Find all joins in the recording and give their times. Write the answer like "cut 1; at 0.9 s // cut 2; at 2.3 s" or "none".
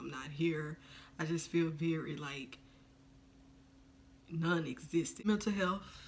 cut 1; at 5.1 s